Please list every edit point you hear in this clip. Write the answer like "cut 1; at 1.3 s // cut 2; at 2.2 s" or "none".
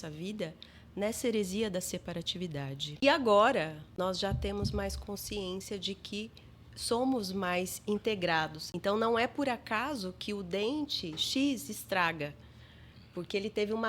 cut 1; at 2.9 s // cut 2; at 3.8 s // cut 3; at 8.6 s

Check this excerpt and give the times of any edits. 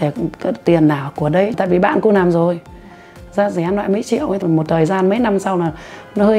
cut 1; at 1.6 s // cut 2; at 4.4 s

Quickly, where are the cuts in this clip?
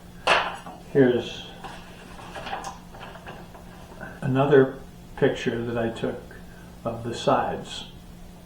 cut 1; at 4.1 s

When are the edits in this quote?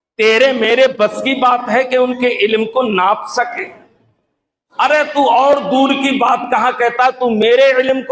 none

